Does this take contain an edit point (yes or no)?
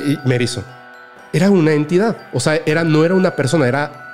yes